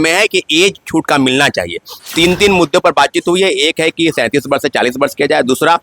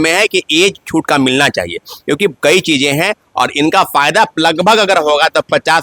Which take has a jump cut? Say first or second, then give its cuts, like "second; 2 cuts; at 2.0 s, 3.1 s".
first; 1 cut; at 1.9 s